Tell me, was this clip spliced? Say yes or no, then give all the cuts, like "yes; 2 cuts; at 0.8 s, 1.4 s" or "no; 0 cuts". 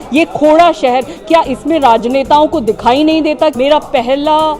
yes; 1 cut; at 3.5 s